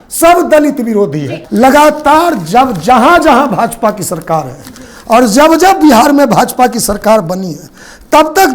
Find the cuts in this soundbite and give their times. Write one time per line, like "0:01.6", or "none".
0:01.3